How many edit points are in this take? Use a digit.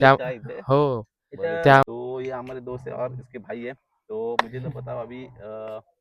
1